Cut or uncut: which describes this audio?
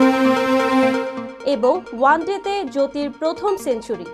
uncut